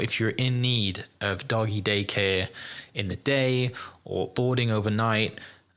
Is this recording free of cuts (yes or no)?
yes